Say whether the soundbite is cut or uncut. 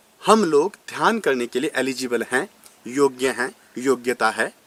uncut